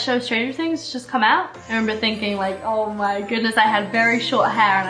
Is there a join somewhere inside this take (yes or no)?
no